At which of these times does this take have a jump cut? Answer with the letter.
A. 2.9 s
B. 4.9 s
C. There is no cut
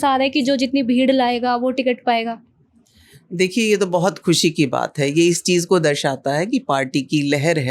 C